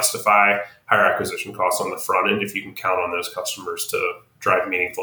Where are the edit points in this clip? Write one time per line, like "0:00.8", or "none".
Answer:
none